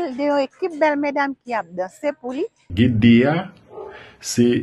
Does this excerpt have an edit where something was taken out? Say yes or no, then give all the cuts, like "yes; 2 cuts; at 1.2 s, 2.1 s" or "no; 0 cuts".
yes; 1 cut; at 2.6 s